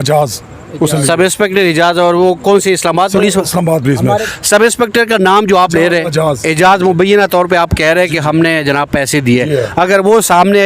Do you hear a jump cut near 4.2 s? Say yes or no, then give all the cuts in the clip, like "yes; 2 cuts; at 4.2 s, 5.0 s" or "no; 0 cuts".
yes; 1 cut; at 4.2 s